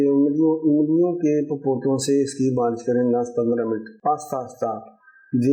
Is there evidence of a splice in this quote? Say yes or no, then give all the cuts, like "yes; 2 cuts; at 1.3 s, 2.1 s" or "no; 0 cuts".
yes; 1 cut; at 3.9 s